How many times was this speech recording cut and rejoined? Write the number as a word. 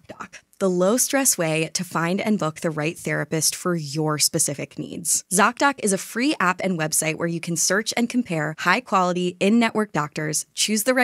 one